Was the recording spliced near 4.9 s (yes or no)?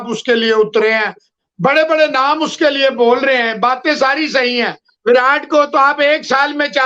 yes